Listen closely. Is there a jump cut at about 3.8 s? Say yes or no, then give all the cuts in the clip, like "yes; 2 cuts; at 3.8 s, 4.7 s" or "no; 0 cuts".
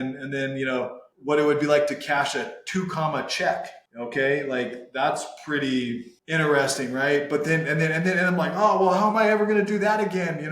yes; 3 cuts; at 1.1 s, 3.8 s, 6.1 s